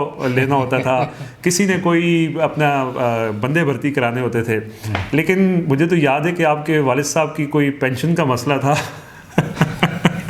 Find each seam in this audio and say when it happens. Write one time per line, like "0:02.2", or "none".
none